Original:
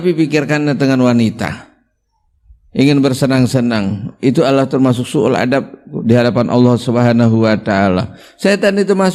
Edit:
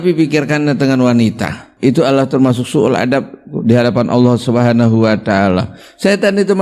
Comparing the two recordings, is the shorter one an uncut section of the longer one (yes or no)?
no